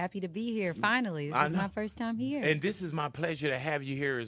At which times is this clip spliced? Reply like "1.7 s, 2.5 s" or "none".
1.3 s